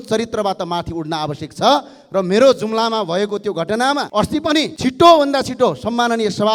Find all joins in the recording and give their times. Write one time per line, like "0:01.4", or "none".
none